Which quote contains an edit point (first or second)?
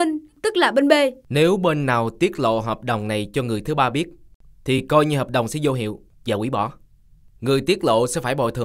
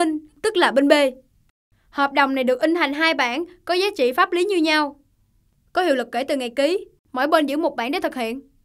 first